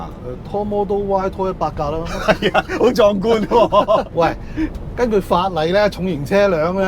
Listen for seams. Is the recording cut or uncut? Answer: cut